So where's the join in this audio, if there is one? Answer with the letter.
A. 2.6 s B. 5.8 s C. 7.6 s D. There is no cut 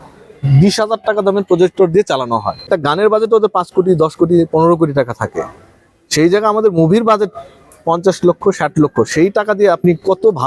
A